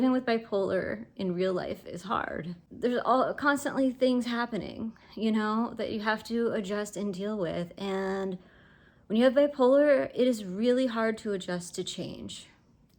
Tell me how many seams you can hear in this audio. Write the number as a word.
one